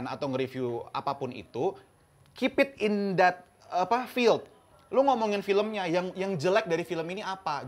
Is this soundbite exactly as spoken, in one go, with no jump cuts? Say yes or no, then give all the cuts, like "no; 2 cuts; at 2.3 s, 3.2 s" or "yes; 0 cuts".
yes; 0 cuts